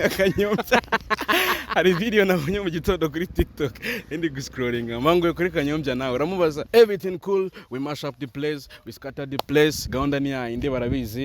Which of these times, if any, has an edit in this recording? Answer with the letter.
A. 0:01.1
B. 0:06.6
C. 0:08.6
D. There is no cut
B